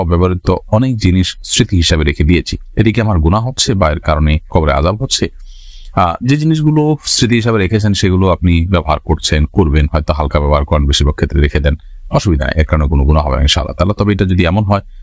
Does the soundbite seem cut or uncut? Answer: uncut